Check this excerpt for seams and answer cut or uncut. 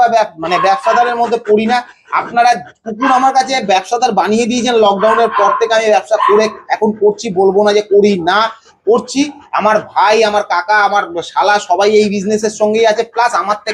uncut